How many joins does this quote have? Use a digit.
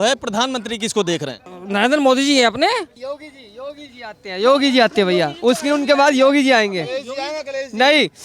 2